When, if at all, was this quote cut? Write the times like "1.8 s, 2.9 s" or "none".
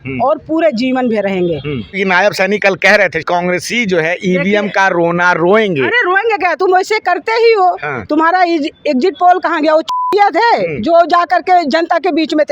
2.0 s, 3.3 s